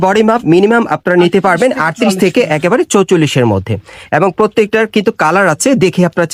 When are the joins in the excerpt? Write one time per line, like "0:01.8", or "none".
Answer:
none